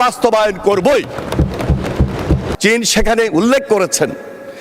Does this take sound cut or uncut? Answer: cut